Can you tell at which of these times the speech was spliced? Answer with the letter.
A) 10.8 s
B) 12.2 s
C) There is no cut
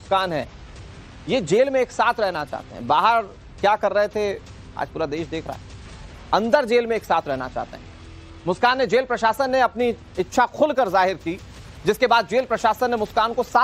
B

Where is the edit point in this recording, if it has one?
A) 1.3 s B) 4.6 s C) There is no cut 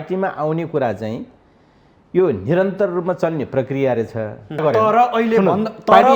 B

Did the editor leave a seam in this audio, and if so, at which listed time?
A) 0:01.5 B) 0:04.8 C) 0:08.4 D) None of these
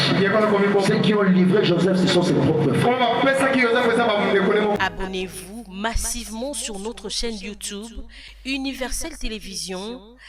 B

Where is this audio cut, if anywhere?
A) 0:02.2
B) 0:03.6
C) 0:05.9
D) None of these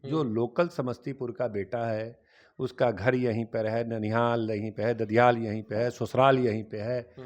D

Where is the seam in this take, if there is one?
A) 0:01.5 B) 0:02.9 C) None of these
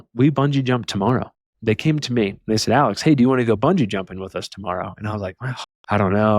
A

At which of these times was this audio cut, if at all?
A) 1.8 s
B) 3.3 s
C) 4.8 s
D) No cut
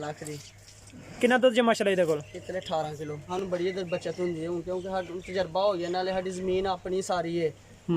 B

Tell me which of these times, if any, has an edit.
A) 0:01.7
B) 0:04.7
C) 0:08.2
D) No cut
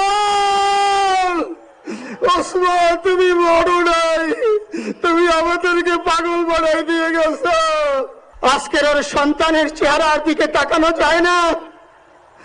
C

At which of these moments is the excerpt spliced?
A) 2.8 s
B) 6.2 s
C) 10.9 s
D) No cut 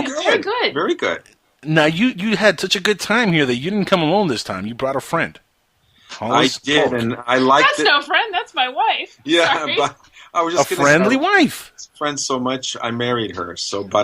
C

